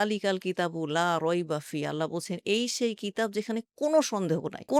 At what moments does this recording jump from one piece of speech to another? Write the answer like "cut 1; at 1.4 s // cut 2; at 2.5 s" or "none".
none